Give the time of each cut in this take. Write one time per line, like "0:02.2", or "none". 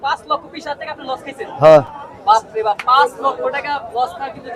none